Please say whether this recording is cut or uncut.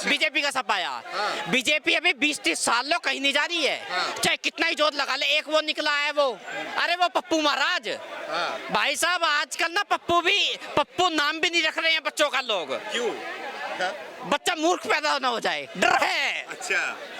uncut